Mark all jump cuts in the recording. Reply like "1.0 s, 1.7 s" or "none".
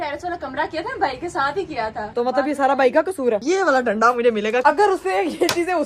2.1 s, 3.4 s, 4.6 s